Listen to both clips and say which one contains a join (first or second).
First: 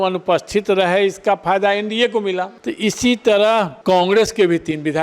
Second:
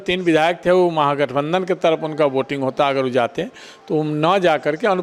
first